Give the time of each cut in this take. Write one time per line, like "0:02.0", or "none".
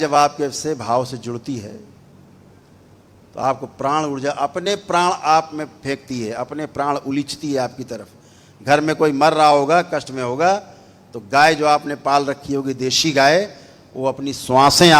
none